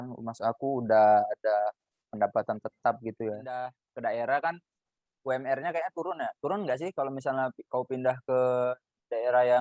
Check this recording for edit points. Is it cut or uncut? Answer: cut